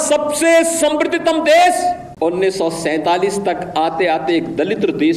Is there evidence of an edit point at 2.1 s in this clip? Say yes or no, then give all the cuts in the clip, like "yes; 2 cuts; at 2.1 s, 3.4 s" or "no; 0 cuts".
yes; 1 cut; at 2.1 s